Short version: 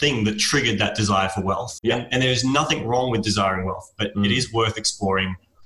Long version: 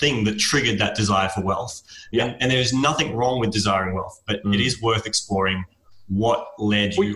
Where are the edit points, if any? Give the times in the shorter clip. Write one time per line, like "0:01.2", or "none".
0:01.7

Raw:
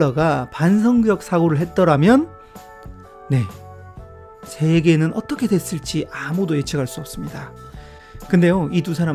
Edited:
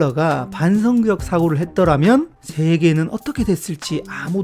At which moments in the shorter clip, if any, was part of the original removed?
0:02.4

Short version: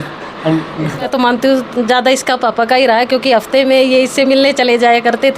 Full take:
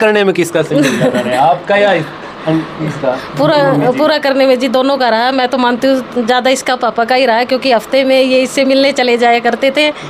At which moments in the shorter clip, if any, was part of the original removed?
0:01.0

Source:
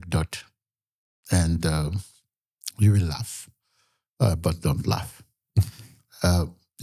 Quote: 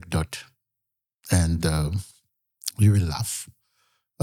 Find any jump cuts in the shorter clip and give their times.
none

